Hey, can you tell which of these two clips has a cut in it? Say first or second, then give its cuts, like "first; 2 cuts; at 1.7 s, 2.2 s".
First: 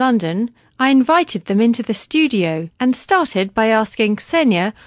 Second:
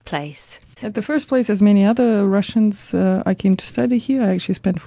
second; 1 cut; at 3.4 s